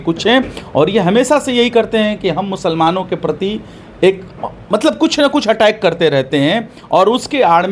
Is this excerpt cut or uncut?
uncut